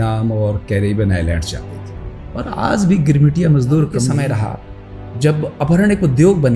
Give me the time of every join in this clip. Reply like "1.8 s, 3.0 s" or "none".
4.1 s